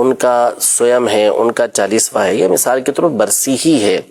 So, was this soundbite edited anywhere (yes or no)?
no